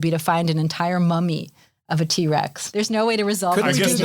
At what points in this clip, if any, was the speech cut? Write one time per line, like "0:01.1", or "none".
0:02.6